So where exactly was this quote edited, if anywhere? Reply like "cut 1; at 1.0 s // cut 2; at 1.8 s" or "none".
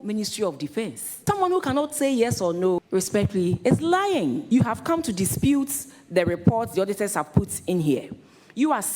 cut 1; at 1.0 s // cut 2; at 2.8 s // cut 3; at 4.4 s